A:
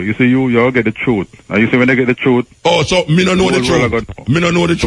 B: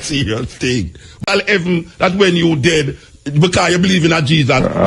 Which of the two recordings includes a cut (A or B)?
B